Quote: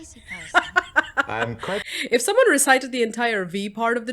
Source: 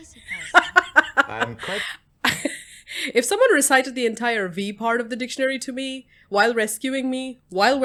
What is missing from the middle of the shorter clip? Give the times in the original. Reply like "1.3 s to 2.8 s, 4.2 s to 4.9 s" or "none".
1.9 s to 3.0 s